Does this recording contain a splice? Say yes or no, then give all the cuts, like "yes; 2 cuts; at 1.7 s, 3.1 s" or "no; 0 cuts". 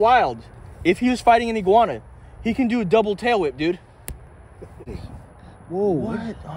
yes; 1 cut; at 4.9 s